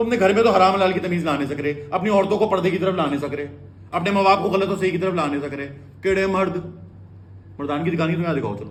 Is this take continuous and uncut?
yes; 0 cuts

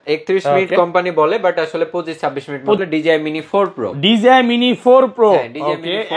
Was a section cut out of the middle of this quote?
yes; 1 cut; at 2.8 s

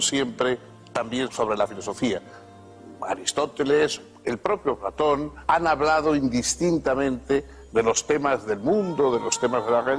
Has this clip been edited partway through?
no; 0 cuts

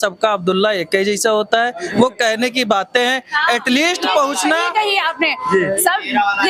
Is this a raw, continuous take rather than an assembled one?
yes; 0 cuts

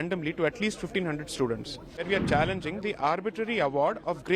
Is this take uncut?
no; 1 cut; at 2.1 s

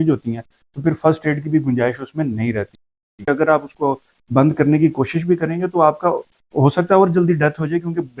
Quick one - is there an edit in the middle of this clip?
yes; 1 cut; at 3.1 s

